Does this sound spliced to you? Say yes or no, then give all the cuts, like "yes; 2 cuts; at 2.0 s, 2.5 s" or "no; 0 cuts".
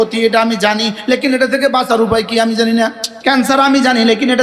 yes; 1 cut; at 3.1 s